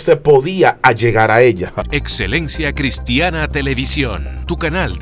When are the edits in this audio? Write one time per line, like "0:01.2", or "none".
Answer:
0:01.9